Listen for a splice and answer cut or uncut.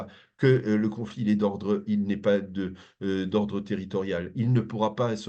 uncut